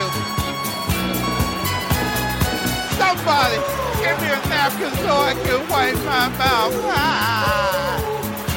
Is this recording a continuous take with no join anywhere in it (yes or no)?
yes